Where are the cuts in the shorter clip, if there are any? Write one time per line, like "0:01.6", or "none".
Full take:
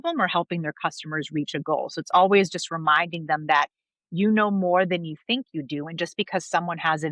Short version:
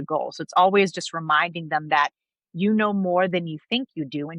none